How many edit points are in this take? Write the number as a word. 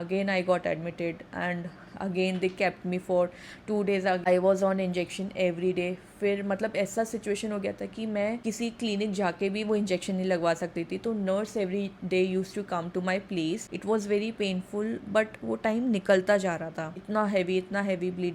three